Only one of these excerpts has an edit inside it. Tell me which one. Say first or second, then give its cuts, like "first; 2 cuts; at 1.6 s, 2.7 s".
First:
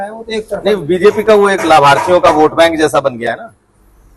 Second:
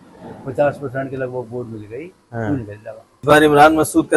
second; 1 cut; at 3.2 s